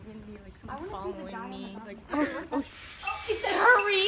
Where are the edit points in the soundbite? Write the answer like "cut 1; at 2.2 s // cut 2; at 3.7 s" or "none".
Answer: cut 1; at 2.8 s